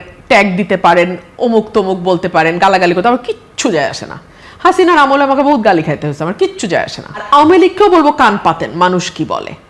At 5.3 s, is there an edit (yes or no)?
no